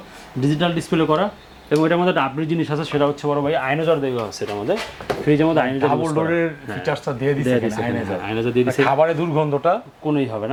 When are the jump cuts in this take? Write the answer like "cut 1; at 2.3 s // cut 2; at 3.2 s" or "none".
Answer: none